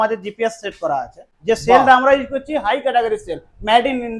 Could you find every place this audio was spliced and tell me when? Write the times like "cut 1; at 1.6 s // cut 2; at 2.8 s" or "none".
cut 1; at 1.3 s